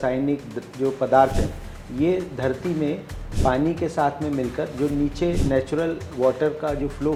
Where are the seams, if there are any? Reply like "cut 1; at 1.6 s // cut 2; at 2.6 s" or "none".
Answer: none